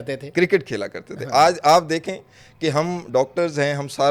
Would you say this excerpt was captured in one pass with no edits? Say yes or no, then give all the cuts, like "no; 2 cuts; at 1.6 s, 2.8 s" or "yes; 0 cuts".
yes; 0 cuts